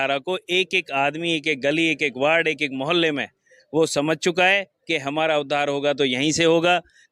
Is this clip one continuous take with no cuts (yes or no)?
yes